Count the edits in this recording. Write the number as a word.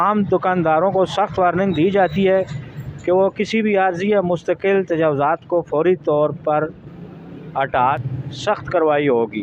one